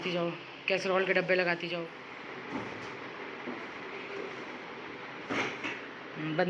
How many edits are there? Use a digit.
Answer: 0